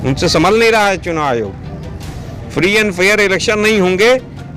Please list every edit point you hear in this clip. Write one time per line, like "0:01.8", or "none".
none